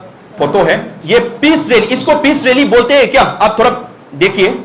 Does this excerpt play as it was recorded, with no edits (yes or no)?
no